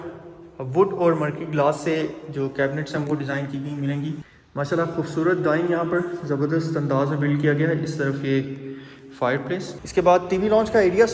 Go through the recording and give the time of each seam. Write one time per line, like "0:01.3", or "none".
0:04.3
0:09.8